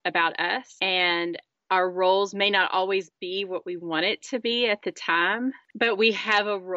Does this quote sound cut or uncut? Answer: uncut